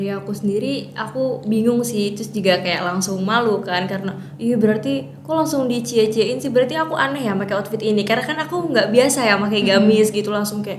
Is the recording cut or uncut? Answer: uncut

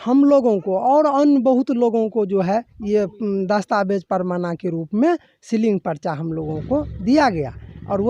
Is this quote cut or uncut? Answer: uncut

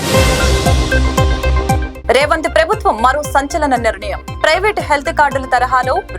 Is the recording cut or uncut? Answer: cut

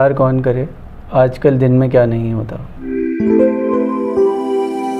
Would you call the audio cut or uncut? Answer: uncut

